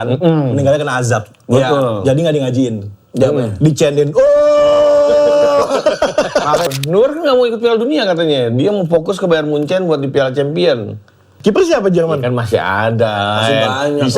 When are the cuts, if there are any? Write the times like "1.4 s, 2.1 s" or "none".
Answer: 6.7 s, 11.3 s